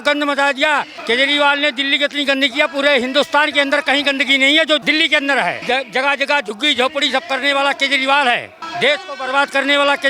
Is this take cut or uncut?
cut